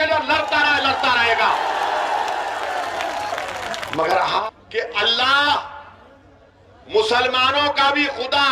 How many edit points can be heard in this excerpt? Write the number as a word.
one